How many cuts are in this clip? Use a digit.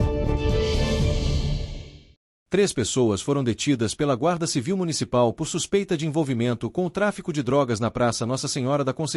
0